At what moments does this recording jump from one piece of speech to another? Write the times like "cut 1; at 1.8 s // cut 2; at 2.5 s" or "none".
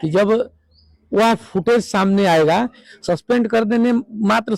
cut 1; at 2.9 s